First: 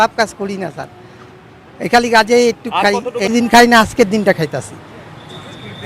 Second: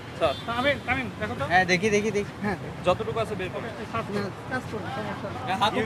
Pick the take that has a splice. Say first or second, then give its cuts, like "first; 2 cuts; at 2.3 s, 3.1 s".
first; 1 cut; at 3.3 s